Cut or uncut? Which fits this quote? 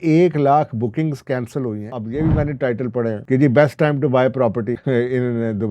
cut